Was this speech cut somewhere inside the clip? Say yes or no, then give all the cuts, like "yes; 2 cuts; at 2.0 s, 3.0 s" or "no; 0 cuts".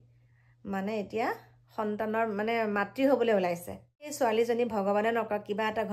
yes; 1 cut; at 4.1 s